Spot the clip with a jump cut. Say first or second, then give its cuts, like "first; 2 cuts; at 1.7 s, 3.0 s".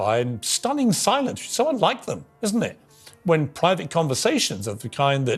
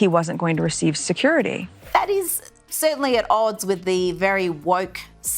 second; 1 cut; at 1.7 s